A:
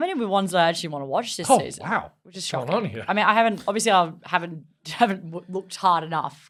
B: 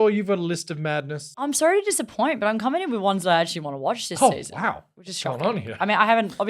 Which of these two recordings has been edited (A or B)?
B